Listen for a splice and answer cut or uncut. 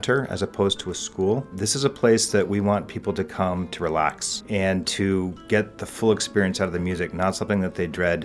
cut